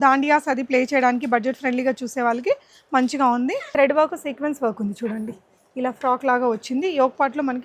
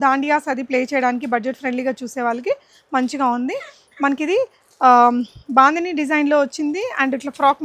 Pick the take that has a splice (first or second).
first